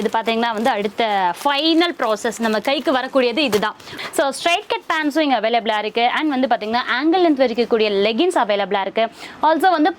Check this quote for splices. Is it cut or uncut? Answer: cut